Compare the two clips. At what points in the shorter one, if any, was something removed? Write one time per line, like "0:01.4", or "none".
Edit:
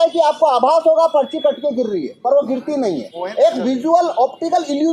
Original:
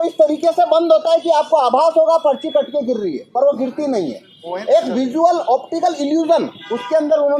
0:03.1